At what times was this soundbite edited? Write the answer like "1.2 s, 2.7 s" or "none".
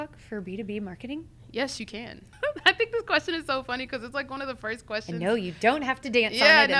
2.2 s